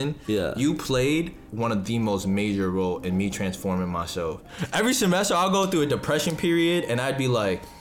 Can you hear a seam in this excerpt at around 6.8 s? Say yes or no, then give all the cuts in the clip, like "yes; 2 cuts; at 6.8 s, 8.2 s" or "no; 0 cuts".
no; 2 cuts; at 1.4 s, 4.5 s